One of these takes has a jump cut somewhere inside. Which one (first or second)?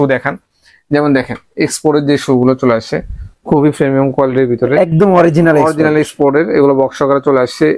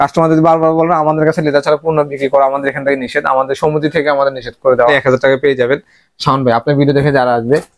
second